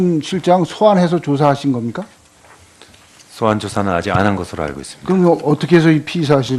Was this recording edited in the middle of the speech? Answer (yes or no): no